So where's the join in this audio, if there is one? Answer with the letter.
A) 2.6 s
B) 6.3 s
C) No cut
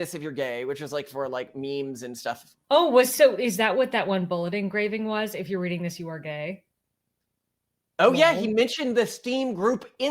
A